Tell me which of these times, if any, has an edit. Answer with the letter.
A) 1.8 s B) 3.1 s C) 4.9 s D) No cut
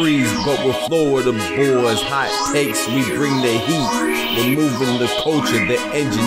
D